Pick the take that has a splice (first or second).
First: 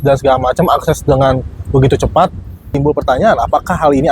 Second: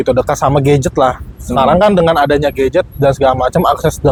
first